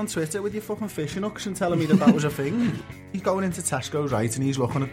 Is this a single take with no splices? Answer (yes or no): no